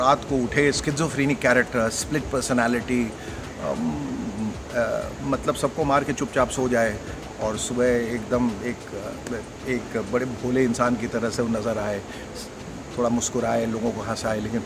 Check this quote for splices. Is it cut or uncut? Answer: uncut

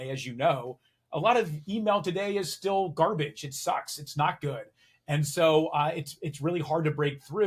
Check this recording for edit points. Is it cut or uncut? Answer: uncut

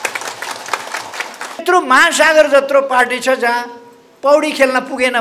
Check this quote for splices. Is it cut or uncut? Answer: cut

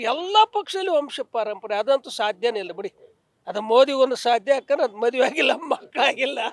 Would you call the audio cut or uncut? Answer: uncut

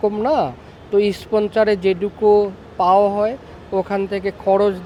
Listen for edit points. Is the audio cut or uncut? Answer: uncut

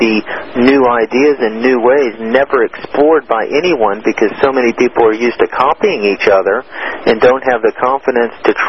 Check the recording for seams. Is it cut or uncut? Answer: uncut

